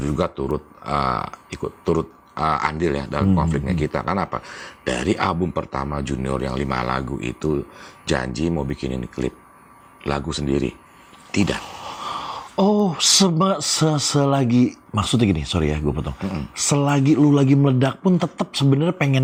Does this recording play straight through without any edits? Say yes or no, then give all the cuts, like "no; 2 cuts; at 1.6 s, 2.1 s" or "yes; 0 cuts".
yes; 0 cuts